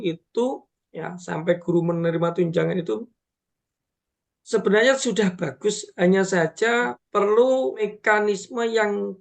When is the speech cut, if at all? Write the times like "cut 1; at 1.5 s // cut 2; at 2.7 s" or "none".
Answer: cut 1; at 7.0 s // cut 2; at 7.9 s